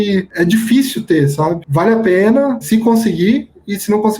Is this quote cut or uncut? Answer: cut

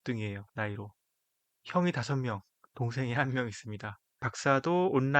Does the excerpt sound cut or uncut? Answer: cut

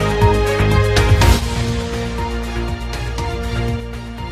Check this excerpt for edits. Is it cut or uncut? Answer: uncut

